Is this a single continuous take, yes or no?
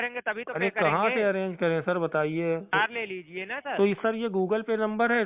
no